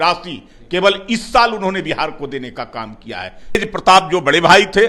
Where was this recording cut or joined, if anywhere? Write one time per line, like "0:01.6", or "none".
0:03.5